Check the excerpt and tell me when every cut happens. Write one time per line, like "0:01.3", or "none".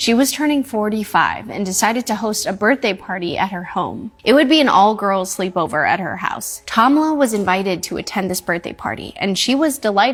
none